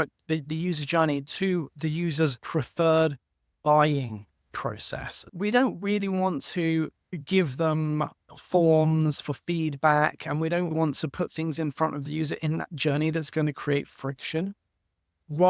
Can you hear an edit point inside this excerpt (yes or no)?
yes